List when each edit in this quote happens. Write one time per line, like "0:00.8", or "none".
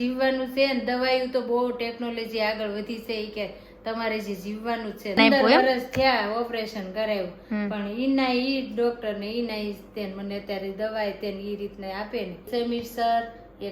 0:05.2
0:12.5